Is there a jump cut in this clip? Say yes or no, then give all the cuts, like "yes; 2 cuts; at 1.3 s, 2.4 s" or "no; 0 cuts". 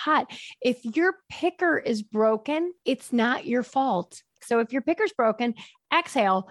yes; 2 cuts; at 2.8 s, 4.4 s